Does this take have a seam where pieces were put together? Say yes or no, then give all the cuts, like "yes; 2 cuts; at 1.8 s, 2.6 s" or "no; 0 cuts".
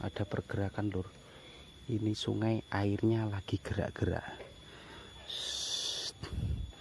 no; 0 cuts